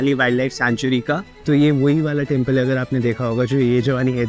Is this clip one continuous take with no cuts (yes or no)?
no